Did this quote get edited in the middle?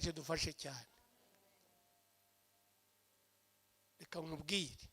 no; 0 cuts

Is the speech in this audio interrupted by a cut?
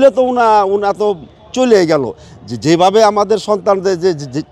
no; 0 cuts

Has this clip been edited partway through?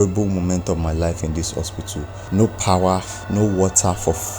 yes; 2 cuts; at 2.1 s, 3.2 s

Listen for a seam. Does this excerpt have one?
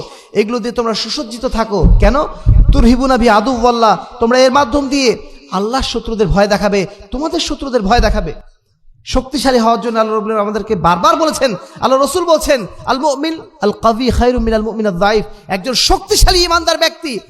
no; 0 cuts

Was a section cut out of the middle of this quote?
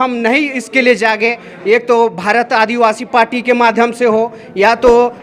no; 0 cuts

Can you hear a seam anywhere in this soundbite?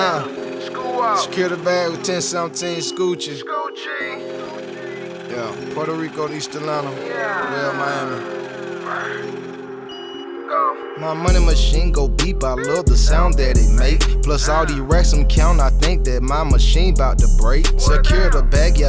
no; 0 cuts

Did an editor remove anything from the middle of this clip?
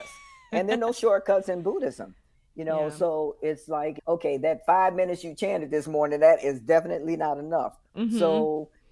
no; 0 cuts

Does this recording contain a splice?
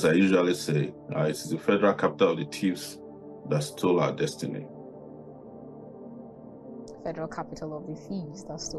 no; 0 cuts

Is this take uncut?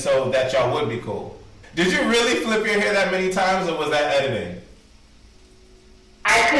no; 1 cut; at 1.6 s

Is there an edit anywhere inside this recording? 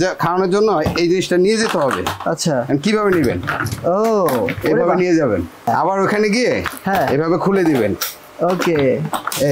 yes; 1 cut; at 5.7 s

